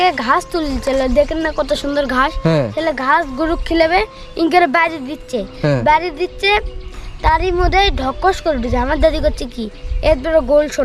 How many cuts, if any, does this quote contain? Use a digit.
0